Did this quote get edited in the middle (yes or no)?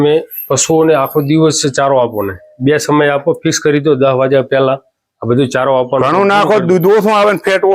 no